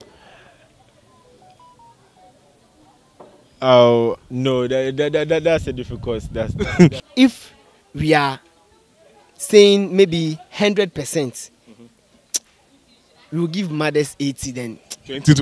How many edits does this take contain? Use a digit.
1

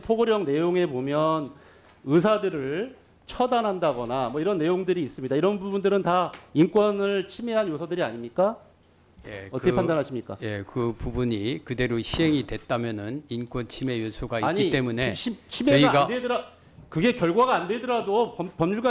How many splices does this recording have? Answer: 0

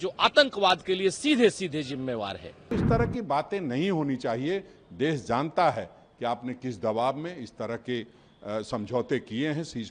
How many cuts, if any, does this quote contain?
1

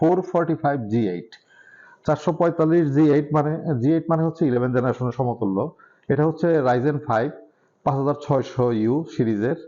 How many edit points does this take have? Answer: 0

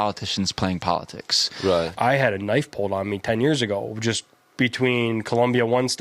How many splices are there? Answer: 1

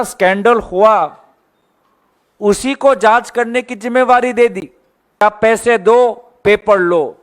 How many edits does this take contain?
1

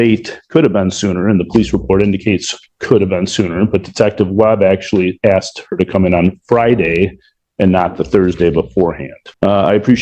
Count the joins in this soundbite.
0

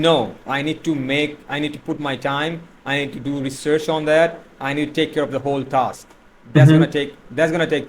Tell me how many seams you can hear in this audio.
0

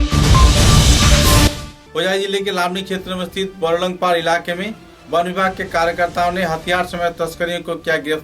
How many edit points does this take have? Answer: 1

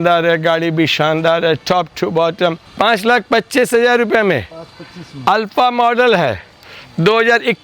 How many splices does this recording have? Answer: 1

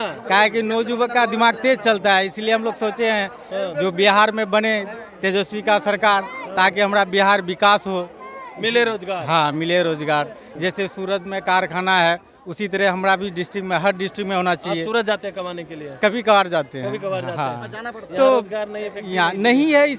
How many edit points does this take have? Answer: 1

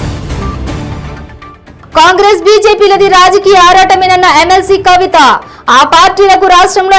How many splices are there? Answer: 1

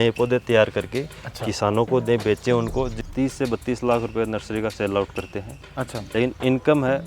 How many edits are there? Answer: 2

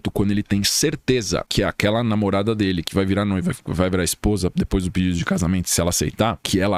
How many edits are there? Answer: 0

